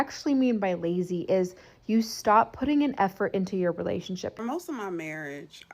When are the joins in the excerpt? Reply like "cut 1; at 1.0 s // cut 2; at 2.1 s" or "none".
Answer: cut 1; at 4.3 s